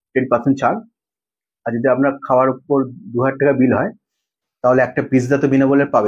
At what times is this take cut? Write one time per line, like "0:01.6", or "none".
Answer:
none